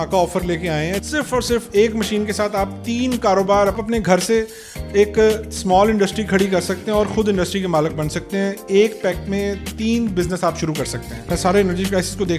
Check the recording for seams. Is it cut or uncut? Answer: cut